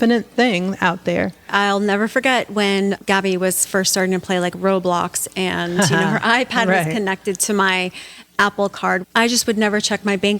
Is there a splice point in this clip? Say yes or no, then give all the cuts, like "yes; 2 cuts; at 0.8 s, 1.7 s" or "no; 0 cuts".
yes; 3 cuts; at 1.5 s, 3.0 s, 9.0 s